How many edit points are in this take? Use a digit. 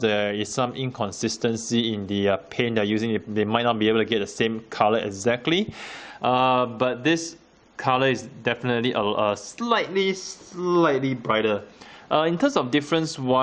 0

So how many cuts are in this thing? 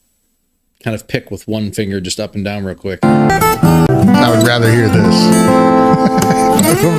1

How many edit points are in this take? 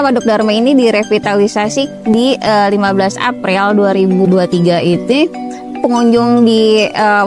2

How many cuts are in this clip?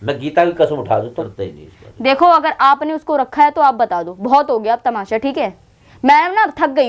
1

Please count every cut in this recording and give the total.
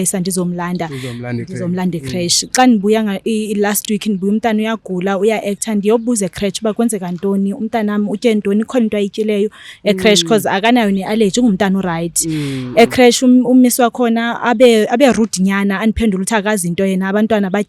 0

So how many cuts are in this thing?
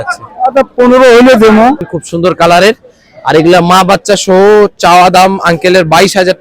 1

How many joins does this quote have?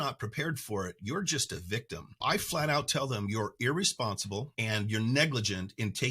2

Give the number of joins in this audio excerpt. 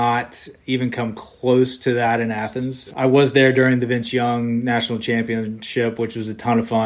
1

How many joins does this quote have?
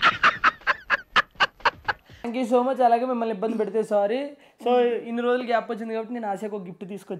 1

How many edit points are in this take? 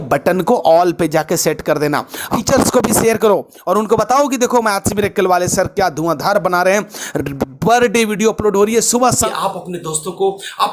2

